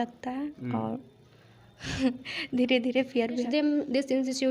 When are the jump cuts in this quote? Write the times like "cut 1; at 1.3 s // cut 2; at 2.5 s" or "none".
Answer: cut 1; at 3.4 s